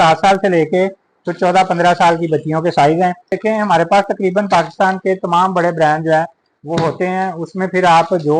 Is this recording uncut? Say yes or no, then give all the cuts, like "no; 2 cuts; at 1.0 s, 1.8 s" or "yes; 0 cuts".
no; 1 cut; at 3.4 s